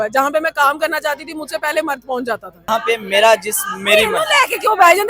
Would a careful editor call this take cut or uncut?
cut